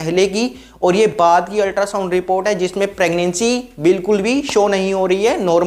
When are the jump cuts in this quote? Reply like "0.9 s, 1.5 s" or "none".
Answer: none